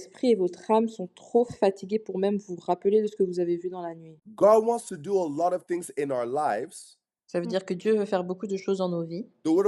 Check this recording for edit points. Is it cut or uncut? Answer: cut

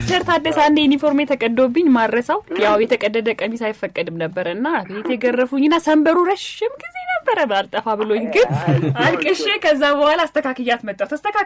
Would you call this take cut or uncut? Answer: uncut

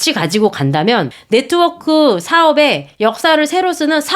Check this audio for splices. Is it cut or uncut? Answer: cut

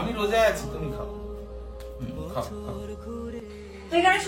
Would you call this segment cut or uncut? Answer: uncut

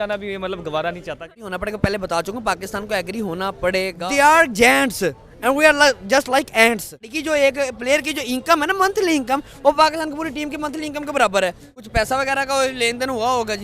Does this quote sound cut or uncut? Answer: cut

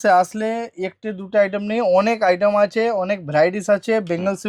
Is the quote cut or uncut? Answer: uncut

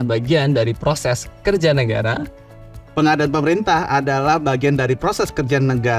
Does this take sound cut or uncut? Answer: uncut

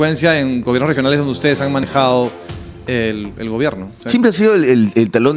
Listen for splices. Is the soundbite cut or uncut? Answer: uncut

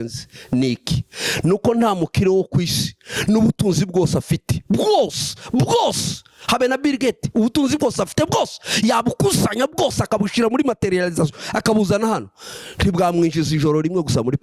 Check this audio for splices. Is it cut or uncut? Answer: uncut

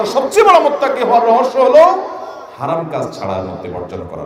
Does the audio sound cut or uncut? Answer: uncut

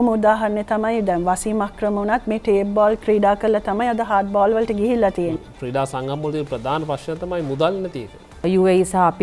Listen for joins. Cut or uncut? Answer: cut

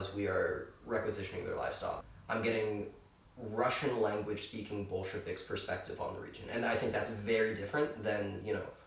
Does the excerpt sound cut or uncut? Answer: cut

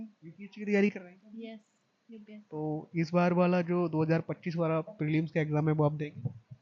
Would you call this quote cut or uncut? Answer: uncut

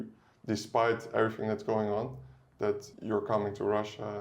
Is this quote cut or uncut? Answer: cut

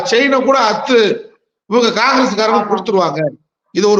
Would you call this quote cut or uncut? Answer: uncut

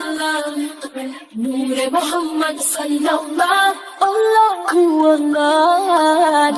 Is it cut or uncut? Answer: uncut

